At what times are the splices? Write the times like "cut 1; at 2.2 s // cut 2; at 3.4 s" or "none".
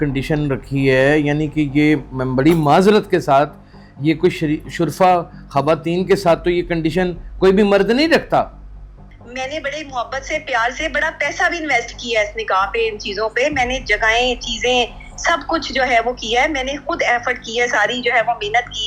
cut 1; at 9.1 s